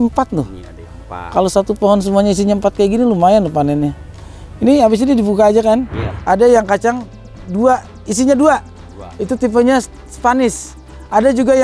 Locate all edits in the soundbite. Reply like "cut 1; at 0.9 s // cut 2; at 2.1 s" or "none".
cut 1; at 6.1 s